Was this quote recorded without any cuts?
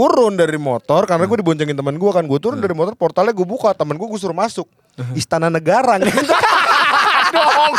yes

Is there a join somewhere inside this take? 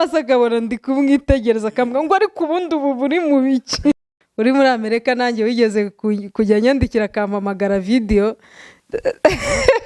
yes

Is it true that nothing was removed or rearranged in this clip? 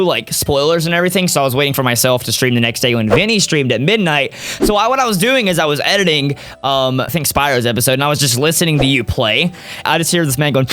no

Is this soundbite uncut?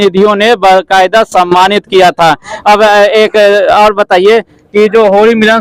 yes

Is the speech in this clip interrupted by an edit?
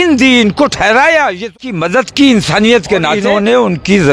yes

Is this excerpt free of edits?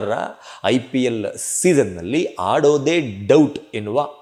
yes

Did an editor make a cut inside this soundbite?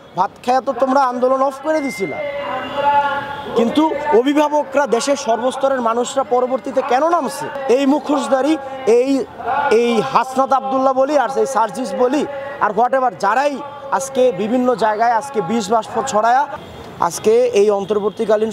yes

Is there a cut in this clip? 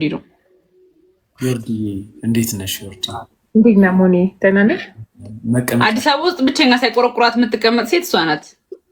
no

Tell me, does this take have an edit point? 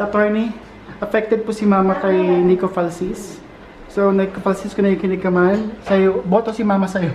no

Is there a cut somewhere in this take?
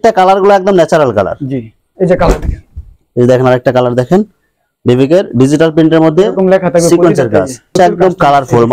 yes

